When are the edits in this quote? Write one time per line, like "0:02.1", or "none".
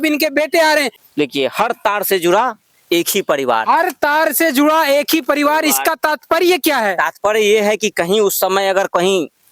0:01.0